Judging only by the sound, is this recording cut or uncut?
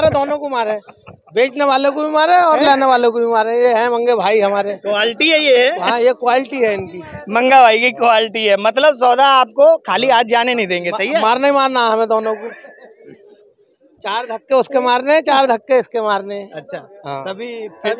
uncut